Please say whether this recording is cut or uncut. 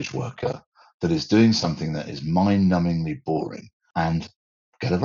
cut